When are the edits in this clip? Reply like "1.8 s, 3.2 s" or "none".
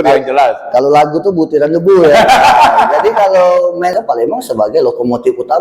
3.9 s